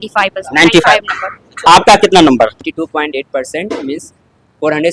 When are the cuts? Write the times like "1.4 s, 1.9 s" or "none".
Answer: 1.6 s, 2.7 s